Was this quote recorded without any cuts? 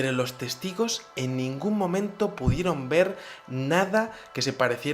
no; 1 cut; at 2.3 s

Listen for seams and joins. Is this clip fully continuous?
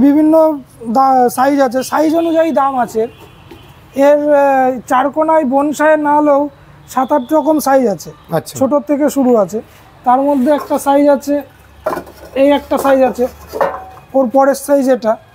yes; 0 cuts

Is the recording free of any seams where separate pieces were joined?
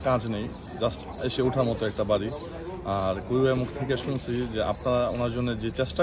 yes; 0 cuts

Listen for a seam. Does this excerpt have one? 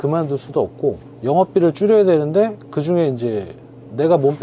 no; 0 cuts

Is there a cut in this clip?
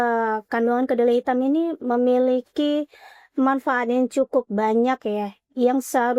no; 0 cuts

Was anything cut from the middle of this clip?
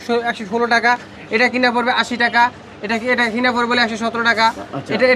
no; 0 cuts

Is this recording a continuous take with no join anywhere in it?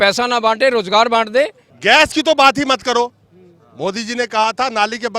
no; 1 cut; at 1.7 s

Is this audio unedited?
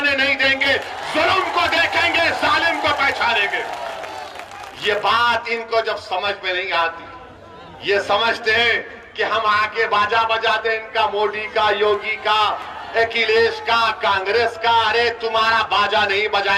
yes; 0 cuts

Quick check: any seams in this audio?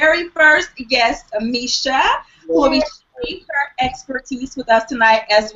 no; 0 cuts

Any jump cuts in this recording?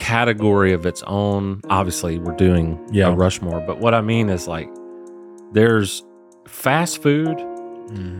no; 0 cuts

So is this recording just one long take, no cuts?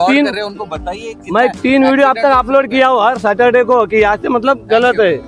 yes; 0 cuts

